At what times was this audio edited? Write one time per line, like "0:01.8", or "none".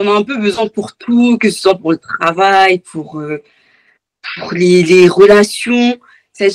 none

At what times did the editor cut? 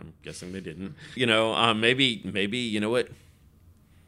0:01.1

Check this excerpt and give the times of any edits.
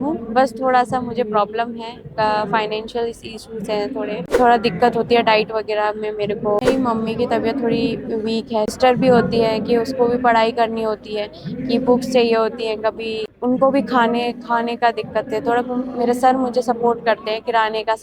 0:04.2
0:06.6
0:08.7
0:13.2

